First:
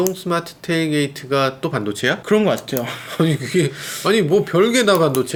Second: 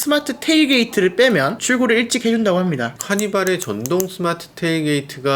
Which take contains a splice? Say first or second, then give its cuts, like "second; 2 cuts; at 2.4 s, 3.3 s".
second; 2 cuts; at 1.6 s, 3.0 s